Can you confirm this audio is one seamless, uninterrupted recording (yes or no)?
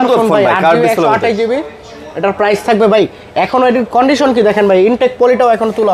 yes